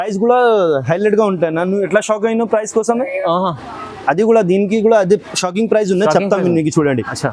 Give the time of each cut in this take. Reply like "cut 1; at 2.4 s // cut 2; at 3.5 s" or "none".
none